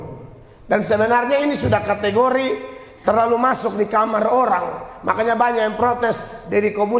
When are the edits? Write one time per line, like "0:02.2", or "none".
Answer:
none